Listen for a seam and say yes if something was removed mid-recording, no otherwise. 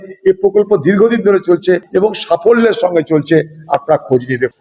yes